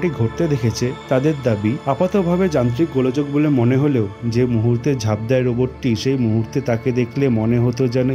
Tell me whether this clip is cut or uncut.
uncut